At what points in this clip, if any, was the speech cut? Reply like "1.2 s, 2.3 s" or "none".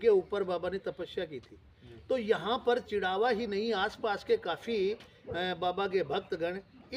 none